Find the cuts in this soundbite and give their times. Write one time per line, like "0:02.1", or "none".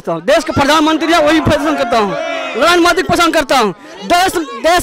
none